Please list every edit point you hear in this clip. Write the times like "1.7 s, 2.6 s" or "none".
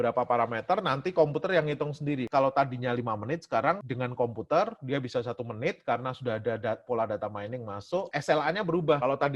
2.2 s, 3.9 s, 8.1 s